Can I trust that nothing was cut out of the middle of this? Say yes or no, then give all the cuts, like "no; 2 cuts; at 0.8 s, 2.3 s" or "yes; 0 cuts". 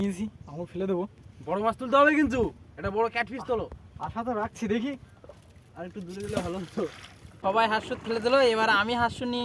no; 1 cut; at 7.4 s